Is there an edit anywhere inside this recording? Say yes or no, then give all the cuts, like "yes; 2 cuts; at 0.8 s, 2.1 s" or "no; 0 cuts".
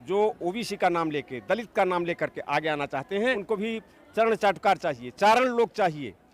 yes; 1 cut; at 3.4 s